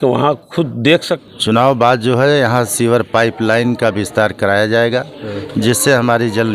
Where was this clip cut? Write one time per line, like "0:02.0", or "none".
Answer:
0:01.2

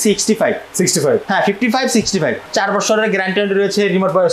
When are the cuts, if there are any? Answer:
0:02.4

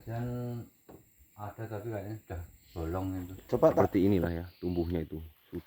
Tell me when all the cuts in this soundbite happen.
0:03.8

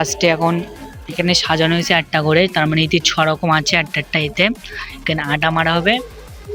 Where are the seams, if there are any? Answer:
none

